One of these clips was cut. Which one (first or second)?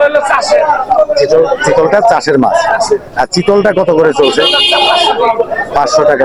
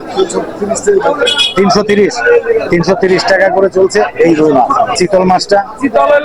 second